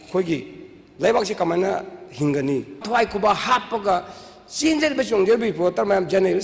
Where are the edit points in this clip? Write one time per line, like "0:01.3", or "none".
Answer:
0:02.8